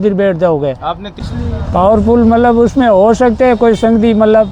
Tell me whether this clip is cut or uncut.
cut